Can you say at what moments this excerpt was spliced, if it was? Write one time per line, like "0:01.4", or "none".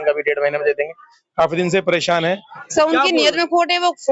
0:02.6